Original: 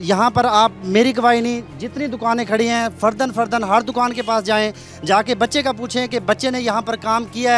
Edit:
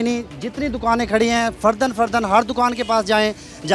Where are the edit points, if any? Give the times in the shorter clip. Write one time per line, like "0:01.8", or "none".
none